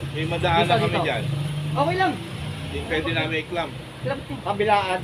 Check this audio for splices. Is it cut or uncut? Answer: uncut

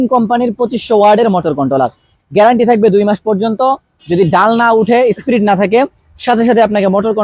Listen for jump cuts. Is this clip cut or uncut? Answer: uncut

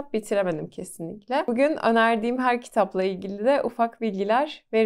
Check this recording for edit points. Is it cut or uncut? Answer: uncut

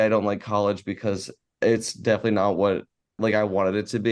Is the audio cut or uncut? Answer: cut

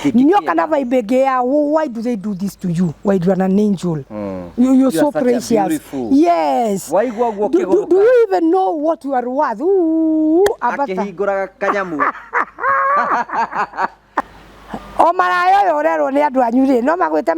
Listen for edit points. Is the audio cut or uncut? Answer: cut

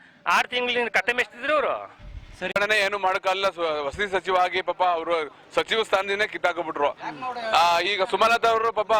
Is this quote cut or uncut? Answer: cut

